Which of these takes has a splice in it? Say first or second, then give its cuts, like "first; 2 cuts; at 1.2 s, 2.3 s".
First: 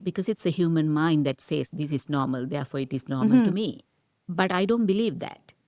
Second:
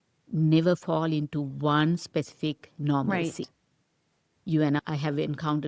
first; 1 cut; at 4.2 s